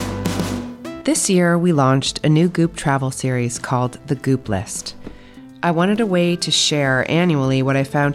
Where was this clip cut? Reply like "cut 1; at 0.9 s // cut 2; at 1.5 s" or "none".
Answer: cut 1; at 1.0 s